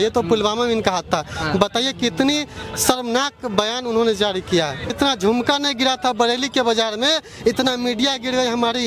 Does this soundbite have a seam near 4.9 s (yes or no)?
yes